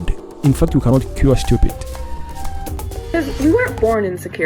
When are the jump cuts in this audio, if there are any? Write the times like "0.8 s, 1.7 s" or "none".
3.1 s